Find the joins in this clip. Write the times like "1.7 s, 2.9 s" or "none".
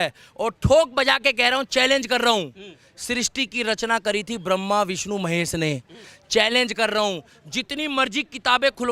none